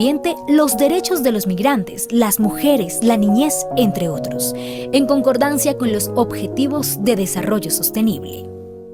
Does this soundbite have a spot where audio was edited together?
no; 0 cuts

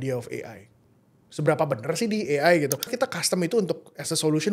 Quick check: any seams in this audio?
yes; 1 cut; at 2.9 s

